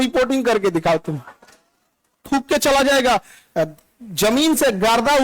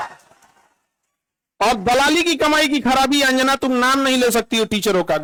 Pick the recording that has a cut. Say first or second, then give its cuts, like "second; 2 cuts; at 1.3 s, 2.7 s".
first; 1 cut; at 2.2 s